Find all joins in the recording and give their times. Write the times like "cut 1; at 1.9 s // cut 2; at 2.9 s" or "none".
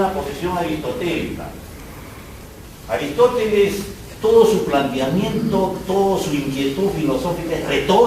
cut 1; at 3.3 s